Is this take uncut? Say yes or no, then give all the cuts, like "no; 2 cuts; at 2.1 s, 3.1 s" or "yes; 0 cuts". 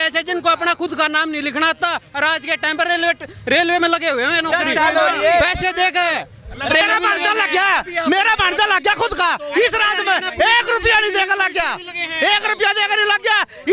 no; 1 cut; at 6.8 s